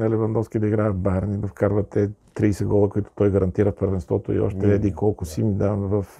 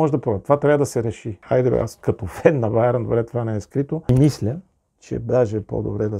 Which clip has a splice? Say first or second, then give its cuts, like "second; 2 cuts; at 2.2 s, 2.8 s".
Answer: second; 2 cuts; at 1.4 s, 4.1 s